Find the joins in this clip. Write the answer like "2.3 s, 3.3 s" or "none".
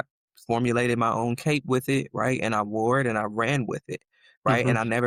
none